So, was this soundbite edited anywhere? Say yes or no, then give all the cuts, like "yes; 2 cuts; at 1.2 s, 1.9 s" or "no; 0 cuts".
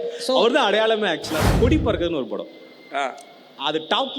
yes; 1 cut; at 1.4 s